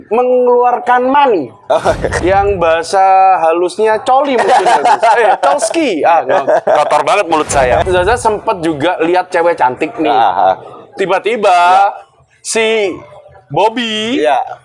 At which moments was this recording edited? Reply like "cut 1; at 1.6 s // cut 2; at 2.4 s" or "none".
cut 1; at 2.2 s // cut 2; at 7.8 s